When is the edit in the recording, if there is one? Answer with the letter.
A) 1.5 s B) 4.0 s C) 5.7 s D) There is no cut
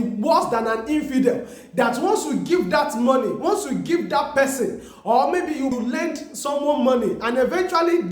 C